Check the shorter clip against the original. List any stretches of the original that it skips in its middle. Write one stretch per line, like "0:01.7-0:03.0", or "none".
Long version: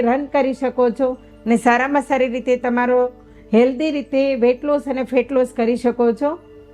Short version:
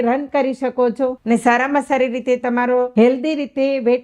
0:01.2-0:01.4
0:03.1-0:03.5